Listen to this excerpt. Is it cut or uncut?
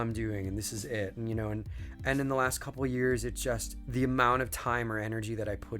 cut